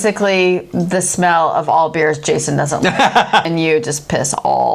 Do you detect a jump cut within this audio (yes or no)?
yes